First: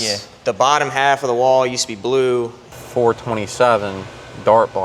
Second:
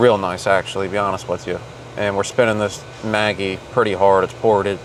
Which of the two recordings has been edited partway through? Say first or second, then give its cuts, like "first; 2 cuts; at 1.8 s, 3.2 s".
first; 1 cut; at 2.8 s